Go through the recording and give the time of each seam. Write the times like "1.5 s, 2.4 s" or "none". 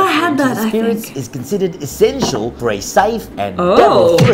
2.5 s, 3.3 s